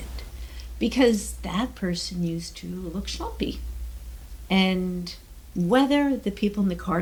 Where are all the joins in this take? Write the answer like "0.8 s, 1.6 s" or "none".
none